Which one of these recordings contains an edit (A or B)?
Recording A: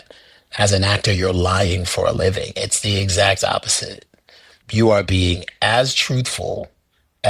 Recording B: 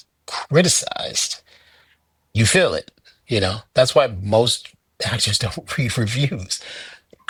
A